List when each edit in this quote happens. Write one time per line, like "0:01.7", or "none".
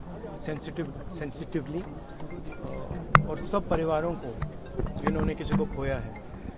none